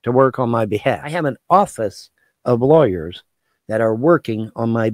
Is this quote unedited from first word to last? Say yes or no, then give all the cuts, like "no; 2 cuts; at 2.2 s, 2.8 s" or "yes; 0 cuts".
no; 1 cut; at 1.1 s